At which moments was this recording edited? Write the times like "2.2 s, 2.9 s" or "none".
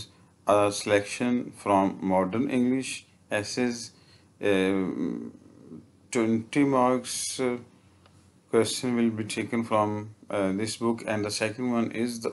none